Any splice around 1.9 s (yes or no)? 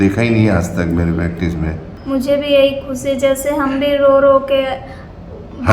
yes